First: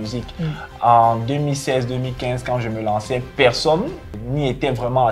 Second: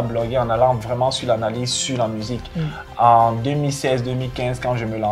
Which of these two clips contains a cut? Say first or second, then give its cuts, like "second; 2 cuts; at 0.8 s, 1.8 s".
first; 1 cut; at 4.1 s